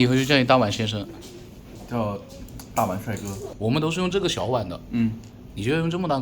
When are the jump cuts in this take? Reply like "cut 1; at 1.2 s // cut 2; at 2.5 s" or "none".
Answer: cut 1; at 3.5 s